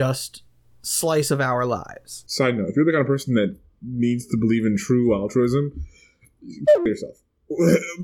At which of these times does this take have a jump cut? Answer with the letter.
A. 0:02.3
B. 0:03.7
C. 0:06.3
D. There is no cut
A